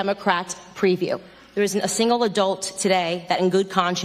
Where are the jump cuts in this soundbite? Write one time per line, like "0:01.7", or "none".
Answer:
0:01.4